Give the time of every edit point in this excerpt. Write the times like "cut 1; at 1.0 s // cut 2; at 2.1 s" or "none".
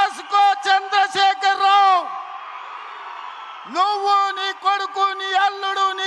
none